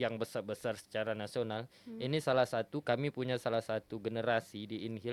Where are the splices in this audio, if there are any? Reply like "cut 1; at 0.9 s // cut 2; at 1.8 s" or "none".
none